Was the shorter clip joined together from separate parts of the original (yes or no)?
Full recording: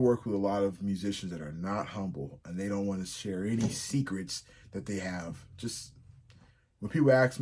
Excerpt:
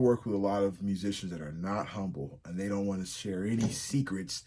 no